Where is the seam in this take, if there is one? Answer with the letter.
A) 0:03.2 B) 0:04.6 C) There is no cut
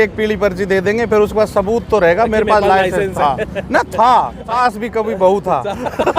B